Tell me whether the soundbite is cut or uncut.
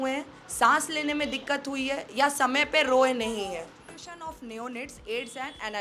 cut